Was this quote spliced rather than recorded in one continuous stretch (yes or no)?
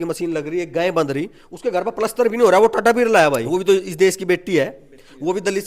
yes